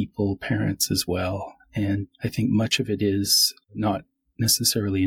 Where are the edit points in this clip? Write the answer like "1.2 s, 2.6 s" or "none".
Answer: 2.1 s, 3.7 s